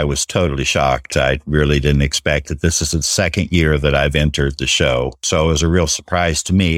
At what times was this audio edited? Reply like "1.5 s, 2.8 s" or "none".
5.2 s